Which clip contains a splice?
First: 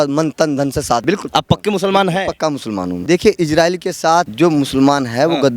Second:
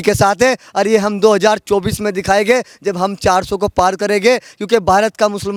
first; 3 cuts; at 1.0 s, 2.9 s, 4.3 s

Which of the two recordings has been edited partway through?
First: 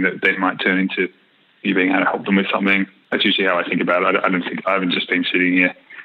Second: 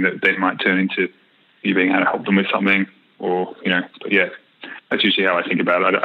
first; 1 cut; at 3.0 s

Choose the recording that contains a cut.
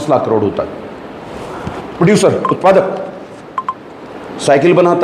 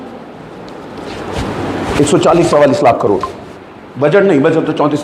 first; 1 cut; at 1.8 s

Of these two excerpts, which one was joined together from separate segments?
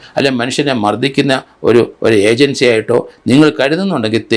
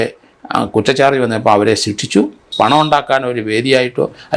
second; 1 cut; at 2.4 s

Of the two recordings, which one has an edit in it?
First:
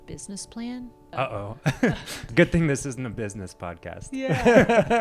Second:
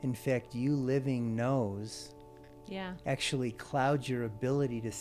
first; 2 cuts; at 1.1 s, 2.2 s

